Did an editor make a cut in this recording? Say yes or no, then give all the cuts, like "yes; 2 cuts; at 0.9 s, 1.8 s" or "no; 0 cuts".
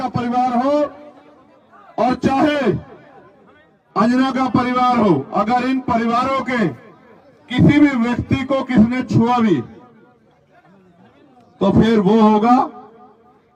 no; 0 cuts